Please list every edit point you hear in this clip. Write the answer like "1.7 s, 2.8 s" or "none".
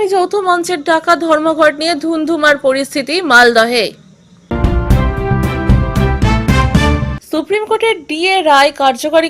4.5 s, 7.2 s